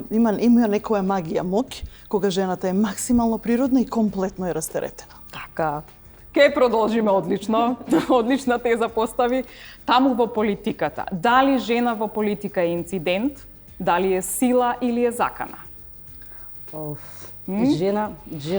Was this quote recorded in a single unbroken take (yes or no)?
yes